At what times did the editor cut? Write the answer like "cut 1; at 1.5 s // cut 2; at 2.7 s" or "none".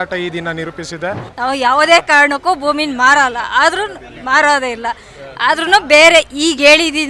cut 1; at 1.3 s